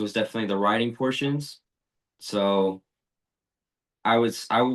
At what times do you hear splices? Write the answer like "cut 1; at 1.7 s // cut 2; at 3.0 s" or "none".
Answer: none